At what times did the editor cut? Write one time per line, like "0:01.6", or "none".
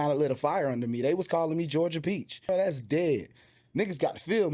0:02.5